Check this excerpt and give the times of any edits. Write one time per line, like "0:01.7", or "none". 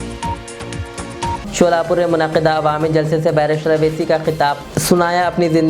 0:01.4